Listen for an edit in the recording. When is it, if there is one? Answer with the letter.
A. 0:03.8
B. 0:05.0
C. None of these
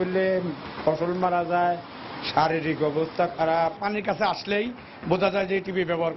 A